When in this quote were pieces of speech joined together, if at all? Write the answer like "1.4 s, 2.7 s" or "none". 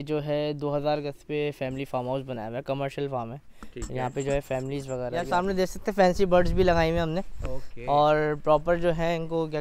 5.2 s